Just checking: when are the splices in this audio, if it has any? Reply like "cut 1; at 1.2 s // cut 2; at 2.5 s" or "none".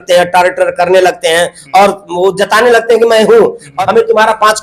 cut 1; at 3.7 s